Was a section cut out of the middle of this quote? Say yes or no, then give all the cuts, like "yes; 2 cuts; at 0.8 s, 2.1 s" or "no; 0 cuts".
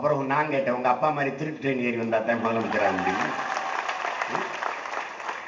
no; 0 cuts